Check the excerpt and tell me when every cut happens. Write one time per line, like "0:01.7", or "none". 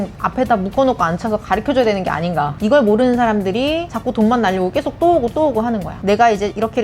0:02.5
0:03.9
0:05.9